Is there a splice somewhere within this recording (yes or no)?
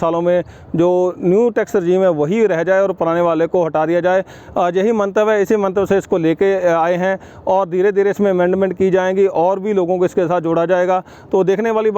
no